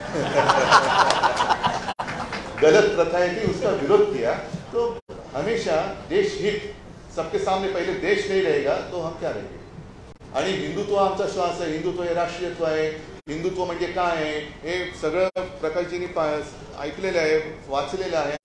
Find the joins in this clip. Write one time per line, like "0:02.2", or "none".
none